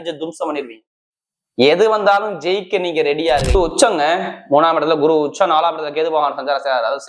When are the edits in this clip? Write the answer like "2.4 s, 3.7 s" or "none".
3.5 s